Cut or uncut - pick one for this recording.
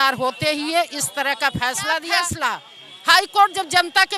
cut